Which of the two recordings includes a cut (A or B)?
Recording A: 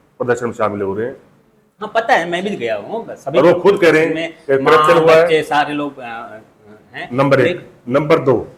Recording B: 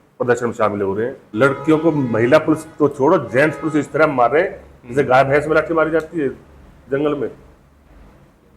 B